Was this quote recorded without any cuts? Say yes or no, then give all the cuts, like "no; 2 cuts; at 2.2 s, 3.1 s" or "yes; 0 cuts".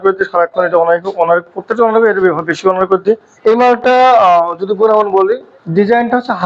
no; 2 cuts; at 3.3 s, 5.5 s